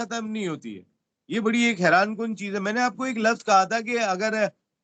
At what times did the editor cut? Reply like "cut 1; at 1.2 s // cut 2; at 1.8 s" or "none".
none

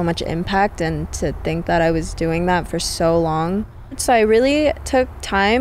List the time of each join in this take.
cut 1; at 4.0 s

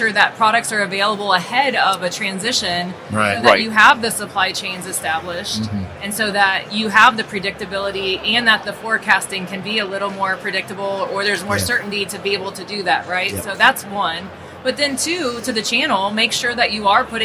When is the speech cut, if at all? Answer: none

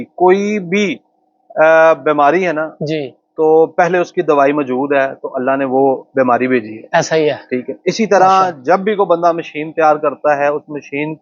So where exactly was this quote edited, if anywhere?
none

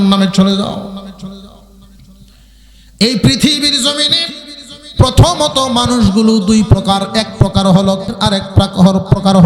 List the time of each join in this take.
cut 1; at 8.1 s

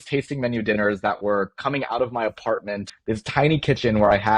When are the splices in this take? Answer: cut 1; at 2.9 s

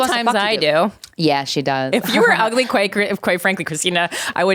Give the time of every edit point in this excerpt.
cut 1; at 1.0 s

